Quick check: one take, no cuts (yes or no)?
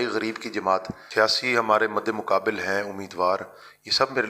no